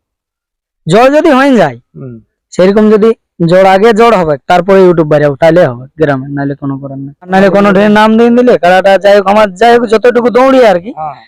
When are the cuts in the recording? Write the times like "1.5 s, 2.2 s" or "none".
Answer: 7.3 s